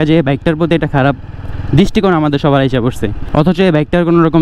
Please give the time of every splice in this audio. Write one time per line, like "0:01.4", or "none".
0:03.1